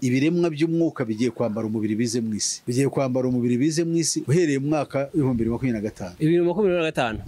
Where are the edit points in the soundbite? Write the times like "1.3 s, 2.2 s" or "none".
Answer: 2.6 s